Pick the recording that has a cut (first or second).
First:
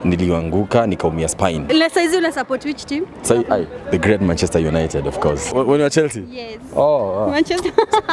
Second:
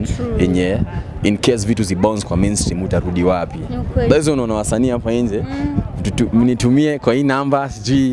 first